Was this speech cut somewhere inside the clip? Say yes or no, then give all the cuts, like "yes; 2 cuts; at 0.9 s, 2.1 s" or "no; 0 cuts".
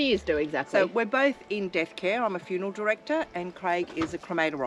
no; 0 cuts